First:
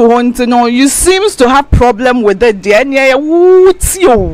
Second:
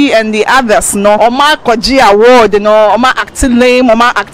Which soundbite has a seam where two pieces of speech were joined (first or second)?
second